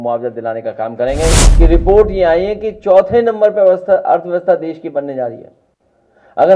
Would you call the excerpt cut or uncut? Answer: cut